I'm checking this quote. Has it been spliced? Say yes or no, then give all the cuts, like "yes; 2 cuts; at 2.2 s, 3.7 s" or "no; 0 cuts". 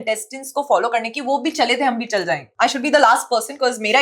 yes; 1 cut; at 2.4 s